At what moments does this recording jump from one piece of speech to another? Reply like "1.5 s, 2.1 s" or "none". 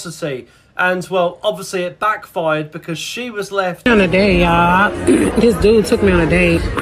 3.8 s